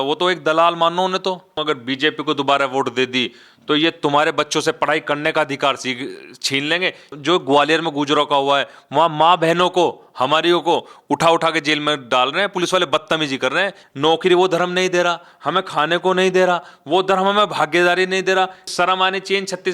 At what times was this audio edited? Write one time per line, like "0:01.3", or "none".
0:01.6
0:07.1
0:13.8
0:18.7